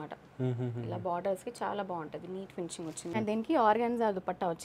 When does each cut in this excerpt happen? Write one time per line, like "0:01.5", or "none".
0:03.1